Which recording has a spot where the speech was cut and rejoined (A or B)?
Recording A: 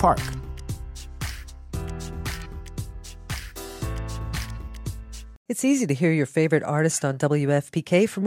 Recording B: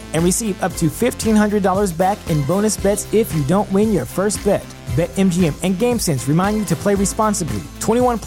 A